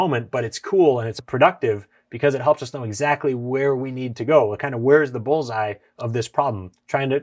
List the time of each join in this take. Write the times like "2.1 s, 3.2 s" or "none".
1.2 s